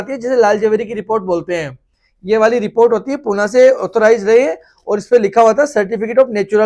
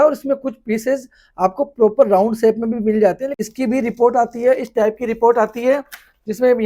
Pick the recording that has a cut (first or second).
second